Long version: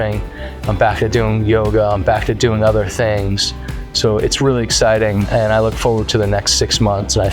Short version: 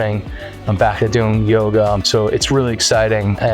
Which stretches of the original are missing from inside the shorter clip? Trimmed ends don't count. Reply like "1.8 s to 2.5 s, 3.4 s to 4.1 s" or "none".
2.0 s to 3.9 s